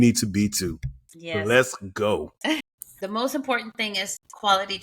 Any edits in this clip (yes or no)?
yes